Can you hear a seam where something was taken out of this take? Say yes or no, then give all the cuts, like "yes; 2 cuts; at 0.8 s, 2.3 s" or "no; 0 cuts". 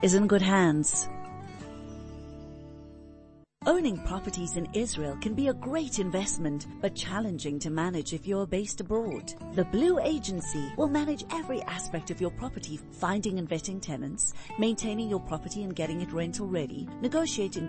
yes; 2 cuts; at 0.9 s, 3.4 s